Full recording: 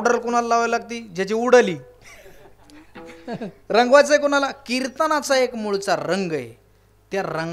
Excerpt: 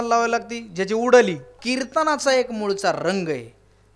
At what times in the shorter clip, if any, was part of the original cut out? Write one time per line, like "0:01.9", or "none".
0:01.6